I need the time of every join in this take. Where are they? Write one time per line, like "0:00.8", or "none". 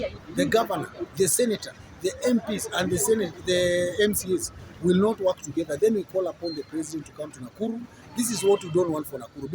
0:08.0